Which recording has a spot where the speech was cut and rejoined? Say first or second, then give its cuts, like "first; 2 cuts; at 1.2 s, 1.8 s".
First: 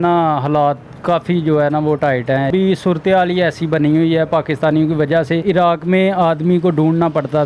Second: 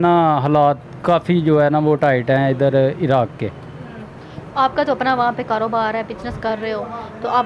first; 2 cuts; at 2.5 s, 5.4 s